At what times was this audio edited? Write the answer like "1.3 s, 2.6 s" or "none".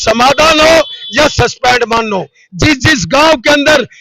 2.4 s